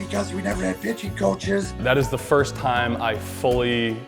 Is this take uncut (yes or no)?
no